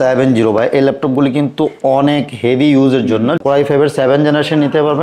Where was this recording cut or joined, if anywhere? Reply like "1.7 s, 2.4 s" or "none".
3.4 s